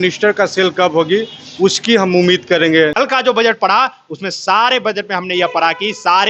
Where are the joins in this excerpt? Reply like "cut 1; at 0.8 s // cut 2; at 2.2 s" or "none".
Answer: cut 1; at 2.9 s